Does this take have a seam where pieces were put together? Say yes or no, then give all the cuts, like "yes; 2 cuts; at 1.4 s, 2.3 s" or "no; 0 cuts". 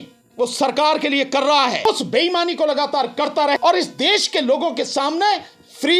yes; 2 cuts; at 1.9 s, 3.6 s